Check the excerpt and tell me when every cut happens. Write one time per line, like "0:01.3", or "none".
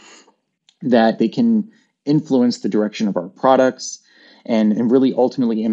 0:01.2